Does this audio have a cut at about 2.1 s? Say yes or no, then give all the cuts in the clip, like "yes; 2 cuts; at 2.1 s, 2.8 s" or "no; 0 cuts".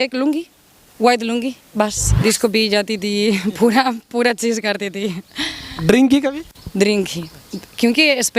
yes; 1 cut; at 2.1 s